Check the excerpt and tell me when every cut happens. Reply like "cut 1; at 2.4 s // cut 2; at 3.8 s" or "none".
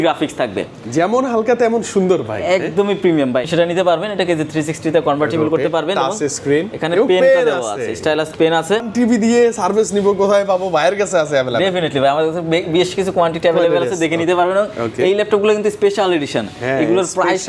cut 1; at 3.5 s // cut 2; at 8.9 s